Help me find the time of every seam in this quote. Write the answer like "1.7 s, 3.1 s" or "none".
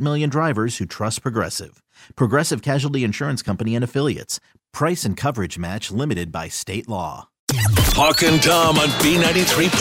7.5 s